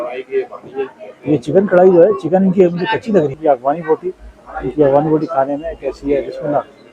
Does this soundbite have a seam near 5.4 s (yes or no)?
no